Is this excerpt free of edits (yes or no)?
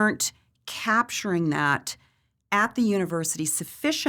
yes